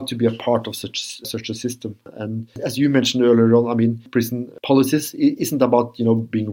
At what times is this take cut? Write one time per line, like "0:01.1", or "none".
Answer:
0:02.1
0:04.1